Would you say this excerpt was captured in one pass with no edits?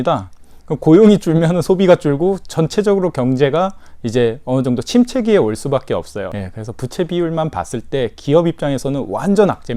no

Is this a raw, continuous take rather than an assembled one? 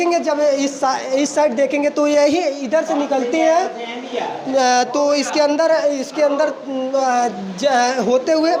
yes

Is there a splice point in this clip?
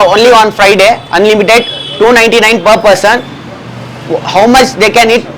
no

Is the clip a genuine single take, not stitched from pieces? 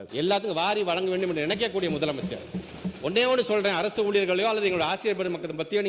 yes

